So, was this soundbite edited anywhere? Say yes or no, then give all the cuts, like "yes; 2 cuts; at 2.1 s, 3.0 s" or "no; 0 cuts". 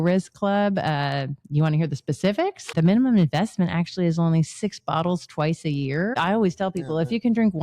yes; 2 cuts; at 2.7 s, 6.2 s